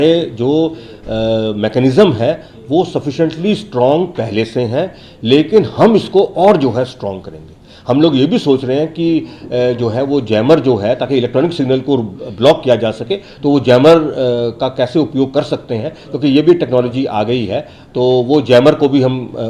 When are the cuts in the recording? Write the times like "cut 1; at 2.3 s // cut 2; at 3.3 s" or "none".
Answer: none